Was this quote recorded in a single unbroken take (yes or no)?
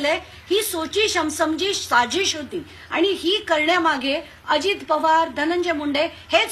yes